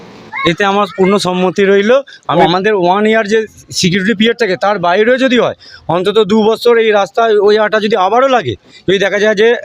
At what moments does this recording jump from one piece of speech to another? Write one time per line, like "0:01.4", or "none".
0:02.3